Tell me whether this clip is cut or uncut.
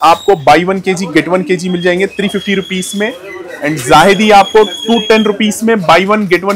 uncut